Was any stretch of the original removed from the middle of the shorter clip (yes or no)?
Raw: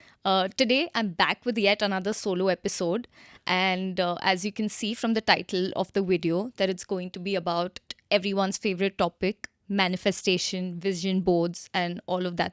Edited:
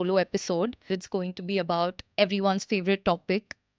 yes